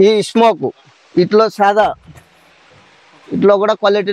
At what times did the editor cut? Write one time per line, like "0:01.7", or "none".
none